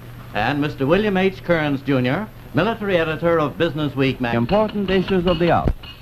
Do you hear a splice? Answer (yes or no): no